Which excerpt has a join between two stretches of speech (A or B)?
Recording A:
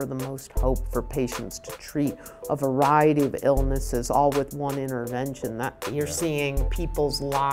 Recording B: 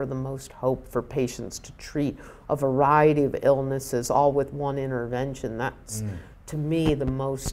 A